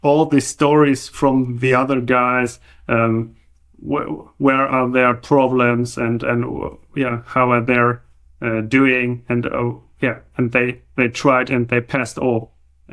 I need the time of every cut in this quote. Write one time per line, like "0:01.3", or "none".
none